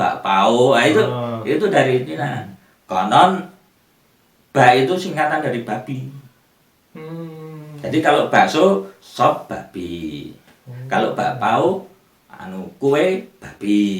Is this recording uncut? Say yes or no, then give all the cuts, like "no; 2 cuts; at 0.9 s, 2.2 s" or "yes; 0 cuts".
yes; 0 cuts